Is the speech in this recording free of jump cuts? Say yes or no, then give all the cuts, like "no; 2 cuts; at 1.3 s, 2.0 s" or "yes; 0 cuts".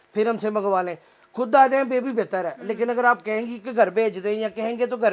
yes; 0 cuts